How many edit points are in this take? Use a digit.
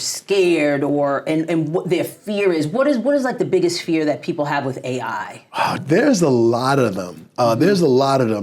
1